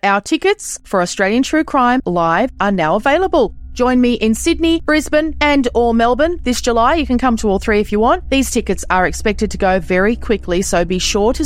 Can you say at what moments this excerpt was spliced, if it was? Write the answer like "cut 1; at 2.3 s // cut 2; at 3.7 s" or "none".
none